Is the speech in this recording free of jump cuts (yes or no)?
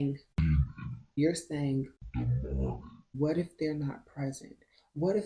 no